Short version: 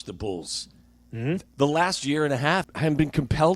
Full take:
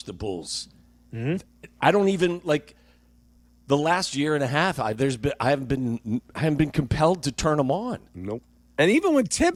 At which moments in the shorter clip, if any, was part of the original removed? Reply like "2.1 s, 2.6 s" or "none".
1.5 s, 2.7 s